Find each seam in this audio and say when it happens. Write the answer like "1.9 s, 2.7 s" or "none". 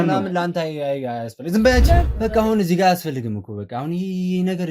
2.1 s